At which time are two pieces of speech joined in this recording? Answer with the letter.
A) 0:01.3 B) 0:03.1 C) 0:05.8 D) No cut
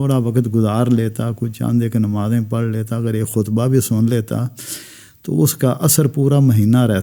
D